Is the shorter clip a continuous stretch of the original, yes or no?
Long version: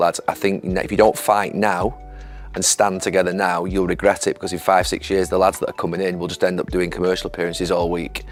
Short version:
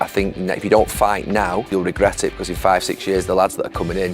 no